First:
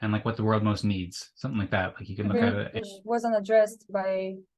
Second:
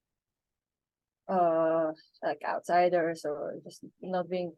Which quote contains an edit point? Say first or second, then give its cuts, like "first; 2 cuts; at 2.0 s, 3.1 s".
first; 1 cut; at 2.7 s